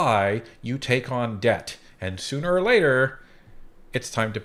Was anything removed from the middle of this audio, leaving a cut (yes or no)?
no